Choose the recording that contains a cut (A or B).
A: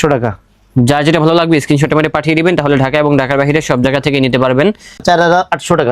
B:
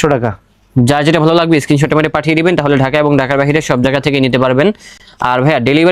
A